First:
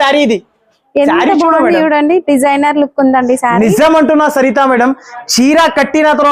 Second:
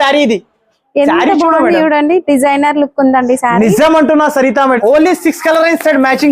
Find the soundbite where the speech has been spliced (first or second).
second